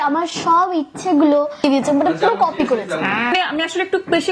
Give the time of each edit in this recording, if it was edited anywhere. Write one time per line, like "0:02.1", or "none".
0:01.6
0:03.3

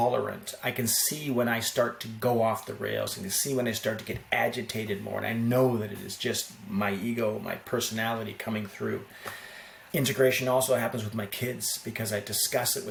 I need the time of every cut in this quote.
none

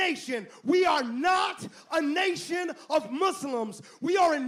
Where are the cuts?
none

